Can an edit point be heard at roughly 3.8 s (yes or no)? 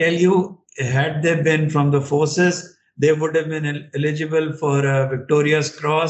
no